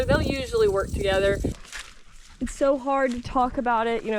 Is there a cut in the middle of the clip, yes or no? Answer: yes